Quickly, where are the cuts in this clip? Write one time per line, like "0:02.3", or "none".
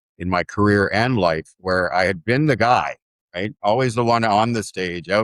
none